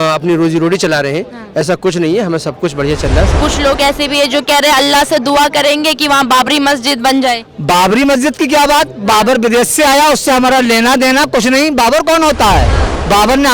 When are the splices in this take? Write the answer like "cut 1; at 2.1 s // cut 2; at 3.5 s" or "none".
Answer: cut 1; at 3.4 s